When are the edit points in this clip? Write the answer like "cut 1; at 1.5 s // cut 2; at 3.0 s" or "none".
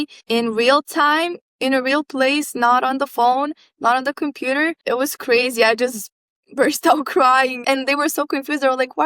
cut 1; at 4.8 s